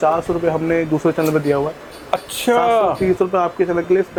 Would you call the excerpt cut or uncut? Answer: uncut